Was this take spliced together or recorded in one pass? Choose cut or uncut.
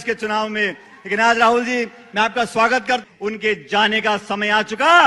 cut